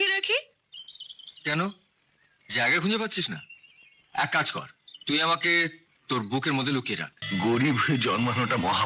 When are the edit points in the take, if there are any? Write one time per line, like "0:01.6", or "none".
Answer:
0:07.1